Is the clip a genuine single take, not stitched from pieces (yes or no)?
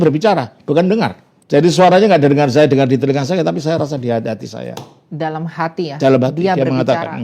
no